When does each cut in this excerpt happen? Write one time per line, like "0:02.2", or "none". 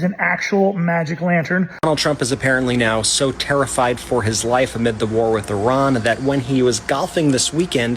0:01.7